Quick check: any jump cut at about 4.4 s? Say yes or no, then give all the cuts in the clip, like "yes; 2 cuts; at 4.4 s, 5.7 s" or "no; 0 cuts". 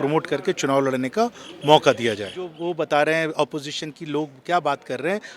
no; 1 cut; at 2.5 s